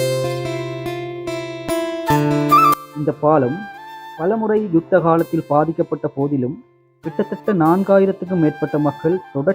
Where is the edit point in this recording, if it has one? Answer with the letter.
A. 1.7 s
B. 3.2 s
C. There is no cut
A